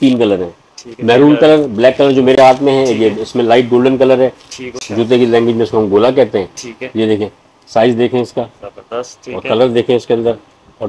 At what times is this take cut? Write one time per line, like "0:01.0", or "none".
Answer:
0:04.6